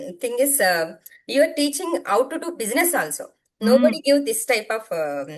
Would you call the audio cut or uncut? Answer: uncut